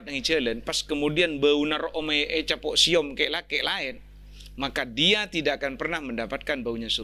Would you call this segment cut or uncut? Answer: uncut